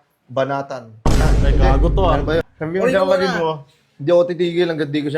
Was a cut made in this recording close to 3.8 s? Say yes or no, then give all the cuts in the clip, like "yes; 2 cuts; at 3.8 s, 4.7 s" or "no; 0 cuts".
no; 1 cut; at 2.5 s